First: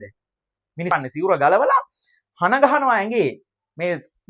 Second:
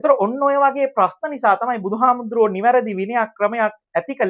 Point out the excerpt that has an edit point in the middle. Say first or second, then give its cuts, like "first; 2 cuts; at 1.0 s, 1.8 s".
first; 1 cut; at 1.0 s